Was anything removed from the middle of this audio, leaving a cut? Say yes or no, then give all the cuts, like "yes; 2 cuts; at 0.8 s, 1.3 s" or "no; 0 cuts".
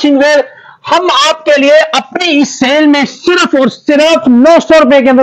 no; 0 cuts